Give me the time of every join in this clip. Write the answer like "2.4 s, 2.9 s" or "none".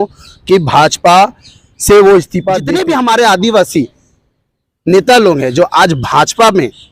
2.6 s